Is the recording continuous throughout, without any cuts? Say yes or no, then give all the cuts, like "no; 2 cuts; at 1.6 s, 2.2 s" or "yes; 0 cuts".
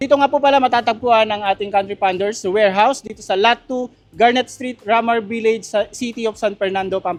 yes; 0 cuts